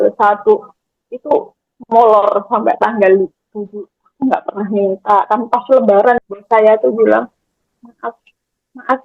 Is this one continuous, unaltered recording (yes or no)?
no